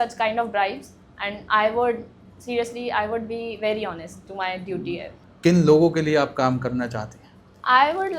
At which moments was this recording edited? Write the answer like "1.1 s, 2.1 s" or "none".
5.2 s

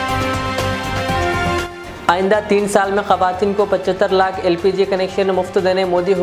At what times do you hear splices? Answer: none

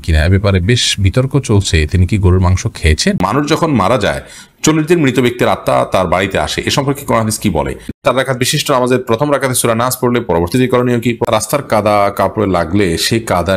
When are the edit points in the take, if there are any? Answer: 3.2 s, 8.0 s, 11.2 s

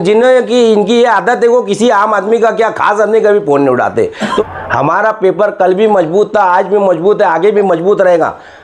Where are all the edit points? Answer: 4.4 s

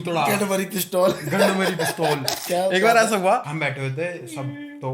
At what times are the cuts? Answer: 2.3 s, 3.5 s

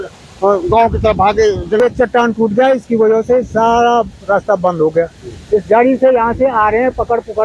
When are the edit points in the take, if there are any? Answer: 1.8 s

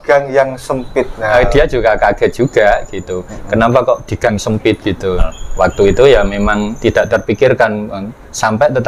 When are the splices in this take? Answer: 1.3 s, 5.2 s

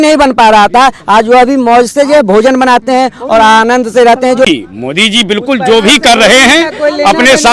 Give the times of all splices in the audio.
4.4 s

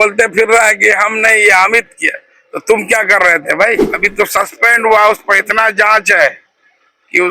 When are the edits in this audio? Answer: 4.0 s

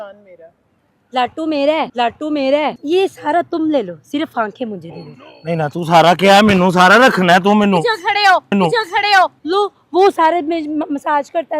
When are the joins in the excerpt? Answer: 2.8 s, 9.4 s

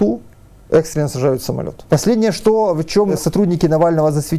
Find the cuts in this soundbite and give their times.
1.7 s, 3.1 s

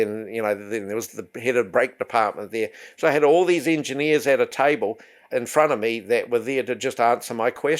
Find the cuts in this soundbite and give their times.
none

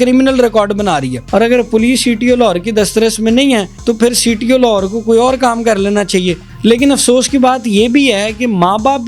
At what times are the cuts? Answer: 1.2 s, 3.7 s, 6.4 s

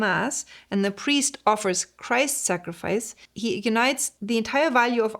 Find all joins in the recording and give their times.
4.1 s

